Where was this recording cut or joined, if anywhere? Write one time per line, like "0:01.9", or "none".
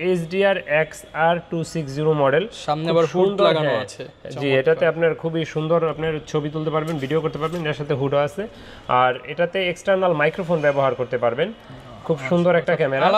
none